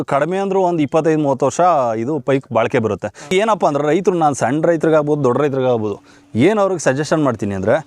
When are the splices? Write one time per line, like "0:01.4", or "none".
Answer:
0:03.3